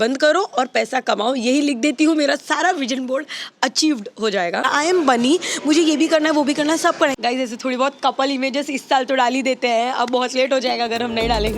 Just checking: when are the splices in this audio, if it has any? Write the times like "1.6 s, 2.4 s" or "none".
4.7 s, 7.2 s